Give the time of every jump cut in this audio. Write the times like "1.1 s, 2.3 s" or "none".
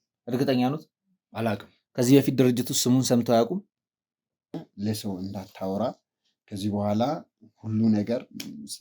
4.5 s

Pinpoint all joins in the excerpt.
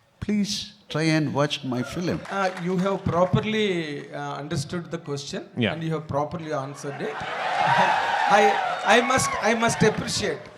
2.2 s

